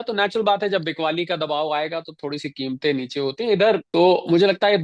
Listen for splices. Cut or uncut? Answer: cut